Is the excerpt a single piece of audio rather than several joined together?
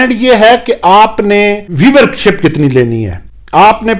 yes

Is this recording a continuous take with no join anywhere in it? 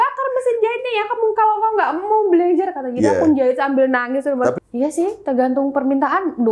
no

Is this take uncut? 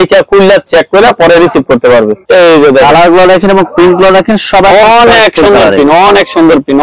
no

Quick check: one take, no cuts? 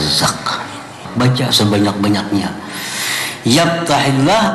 no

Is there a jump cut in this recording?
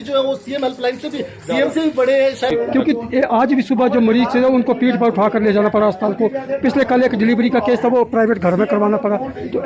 yes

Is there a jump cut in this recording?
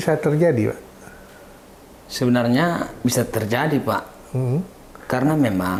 no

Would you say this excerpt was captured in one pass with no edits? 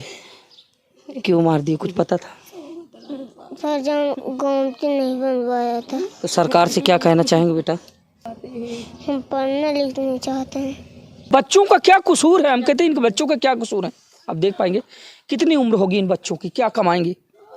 no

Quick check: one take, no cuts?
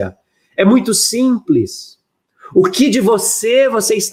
yes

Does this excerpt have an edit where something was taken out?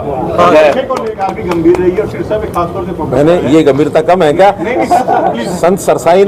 yes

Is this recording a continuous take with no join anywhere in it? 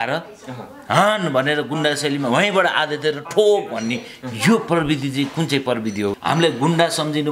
no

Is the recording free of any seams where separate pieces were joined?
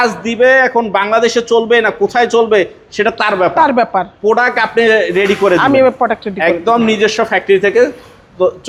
yes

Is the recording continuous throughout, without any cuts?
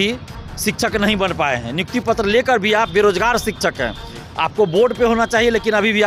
yes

